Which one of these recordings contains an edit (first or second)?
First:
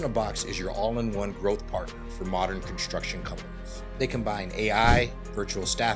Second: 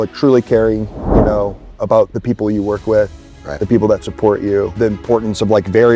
second